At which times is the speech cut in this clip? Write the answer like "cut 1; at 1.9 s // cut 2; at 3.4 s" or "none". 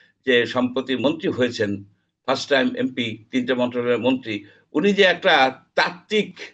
none